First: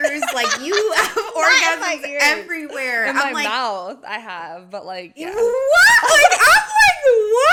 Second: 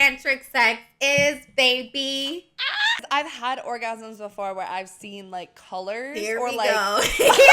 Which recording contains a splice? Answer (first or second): second